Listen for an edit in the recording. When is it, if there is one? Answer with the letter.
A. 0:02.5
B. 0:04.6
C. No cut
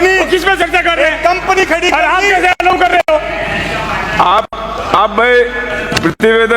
C